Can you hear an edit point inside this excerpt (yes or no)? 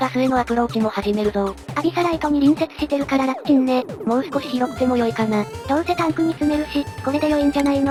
no